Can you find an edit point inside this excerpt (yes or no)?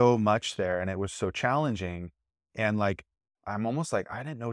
no